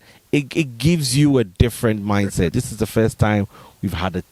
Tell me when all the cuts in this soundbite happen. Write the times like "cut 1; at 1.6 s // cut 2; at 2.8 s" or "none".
cut 1; at 2.5 s